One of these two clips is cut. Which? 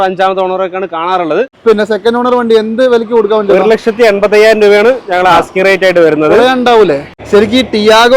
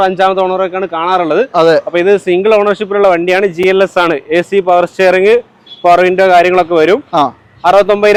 first; 2 cuts; at 1.5 s, 7.2 s

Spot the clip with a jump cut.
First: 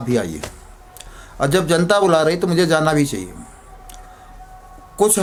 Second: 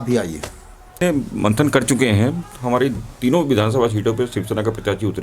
second; 1 cut; at 1.0 s

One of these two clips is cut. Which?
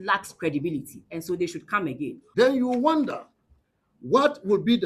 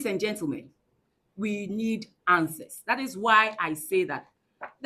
first; 1 cut; at 2.2 s

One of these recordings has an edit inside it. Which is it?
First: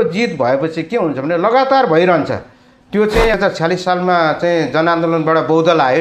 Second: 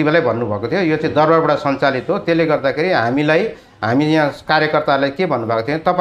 first; 1 cut; at 3.3 s

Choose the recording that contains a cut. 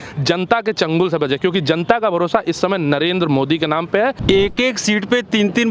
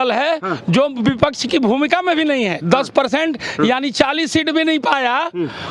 first; 1 cut; at 4.2 s

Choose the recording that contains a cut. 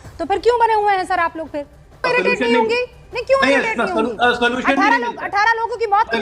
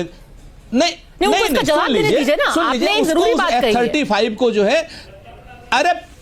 first; 1 cut; at 2.1 s

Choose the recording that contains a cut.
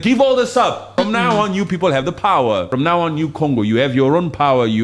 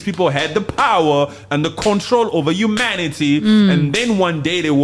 first; 2 cuts; at 0.9 s, 2.7 s

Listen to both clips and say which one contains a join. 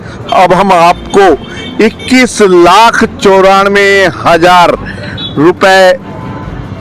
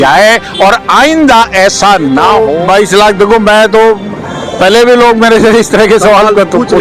second; 1 cut; at 2.5 s

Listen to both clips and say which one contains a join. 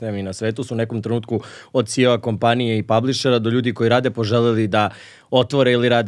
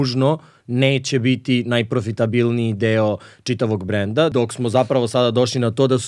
second; 1 cut; at 4.3 s

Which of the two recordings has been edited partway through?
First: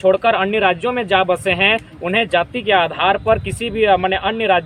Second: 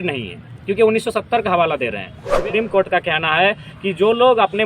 second; 1 cut; at 2.3 s

